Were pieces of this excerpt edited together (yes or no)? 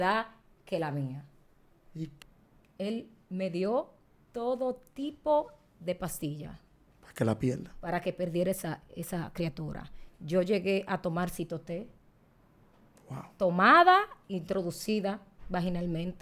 yes